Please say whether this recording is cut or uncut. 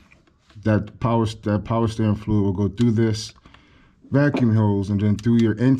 uncut